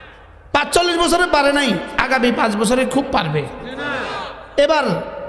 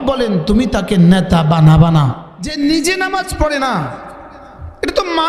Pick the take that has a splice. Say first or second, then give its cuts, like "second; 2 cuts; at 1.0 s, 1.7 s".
second; 1 cut; at 2.5 s